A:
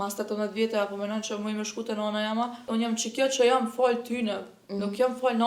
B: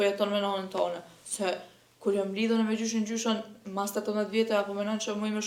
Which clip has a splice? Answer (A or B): A